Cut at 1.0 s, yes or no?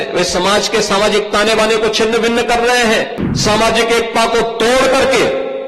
no